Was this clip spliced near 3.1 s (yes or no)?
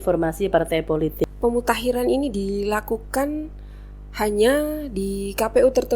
no